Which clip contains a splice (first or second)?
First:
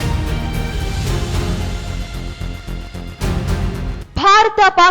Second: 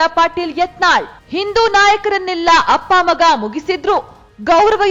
first